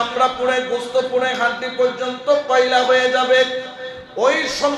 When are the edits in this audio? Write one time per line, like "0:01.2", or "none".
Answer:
none

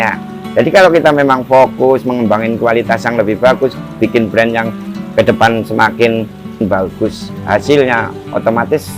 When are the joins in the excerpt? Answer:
0:06.6

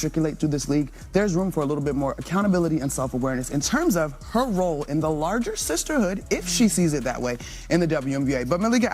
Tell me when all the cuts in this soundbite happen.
0:08.0

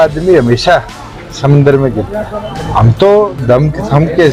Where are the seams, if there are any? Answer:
0:02.5

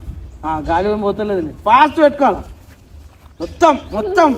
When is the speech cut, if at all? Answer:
none

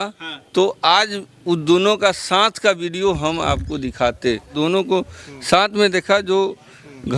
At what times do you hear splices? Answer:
0:04.5

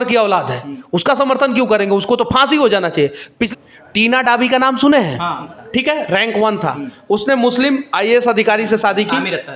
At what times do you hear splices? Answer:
0:03.3
0:05.5

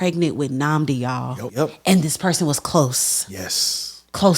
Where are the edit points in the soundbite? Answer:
0:01.4

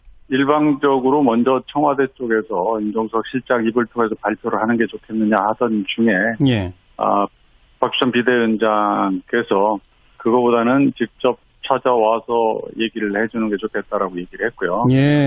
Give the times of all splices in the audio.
0:07.4

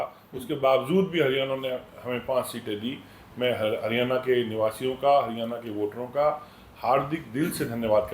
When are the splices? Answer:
none

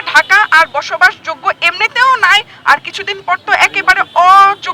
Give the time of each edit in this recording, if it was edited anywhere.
none

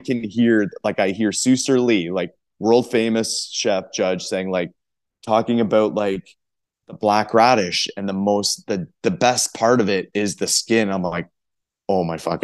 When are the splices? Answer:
none

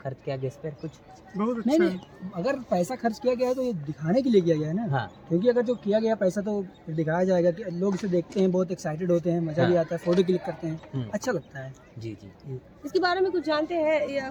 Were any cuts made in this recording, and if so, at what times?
none

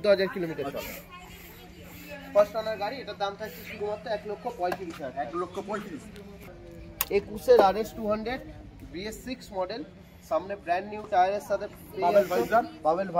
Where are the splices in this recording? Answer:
0:06.5

